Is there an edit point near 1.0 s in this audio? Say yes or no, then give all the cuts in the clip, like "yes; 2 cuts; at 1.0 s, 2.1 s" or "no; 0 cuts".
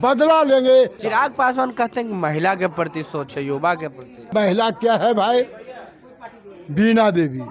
yes; 2 cuts; at 1.0 s, 4.3 s